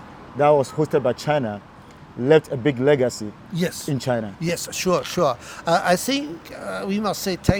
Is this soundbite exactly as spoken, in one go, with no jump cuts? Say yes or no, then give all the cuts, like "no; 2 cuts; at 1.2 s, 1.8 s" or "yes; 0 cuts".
yes; 0 cuts